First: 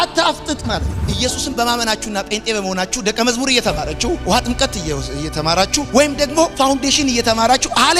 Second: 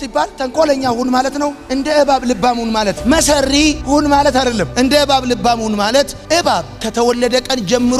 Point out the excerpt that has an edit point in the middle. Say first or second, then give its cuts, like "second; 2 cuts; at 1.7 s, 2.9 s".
first; 1 cut; at 1.0 s